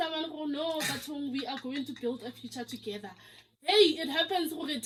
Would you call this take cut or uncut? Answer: uncut